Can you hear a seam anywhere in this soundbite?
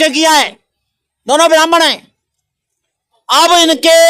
no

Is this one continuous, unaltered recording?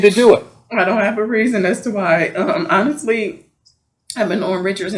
yes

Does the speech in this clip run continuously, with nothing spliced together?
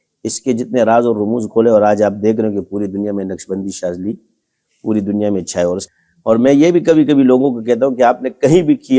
no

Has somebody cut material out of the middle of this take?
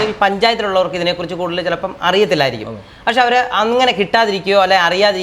no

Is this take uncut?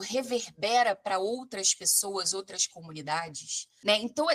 yes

